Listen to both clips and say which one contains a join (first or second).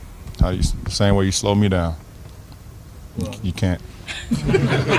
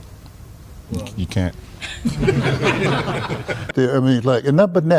second